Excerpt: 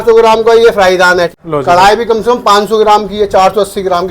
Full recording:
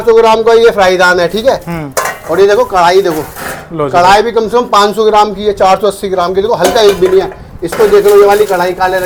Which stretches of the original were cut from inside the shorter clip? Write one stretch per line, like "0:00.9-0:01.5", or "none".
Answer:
0:01.3-0:03.6